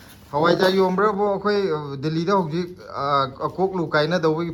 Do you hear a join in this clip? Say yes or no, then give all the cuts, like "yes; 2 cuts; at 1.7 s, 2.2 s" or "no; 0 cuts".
no; 0 cuts